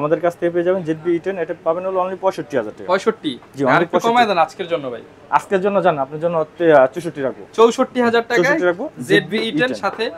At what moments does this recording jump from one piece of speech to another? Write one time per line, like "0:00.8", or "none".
none